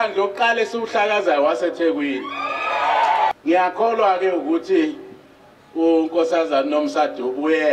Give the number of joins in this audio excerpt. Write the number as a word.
one